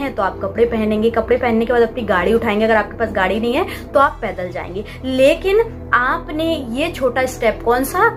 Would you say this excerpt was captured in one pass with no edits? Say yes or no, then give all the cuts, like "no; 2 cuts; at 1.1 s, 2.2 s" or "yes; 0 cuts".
yes; 0 cuts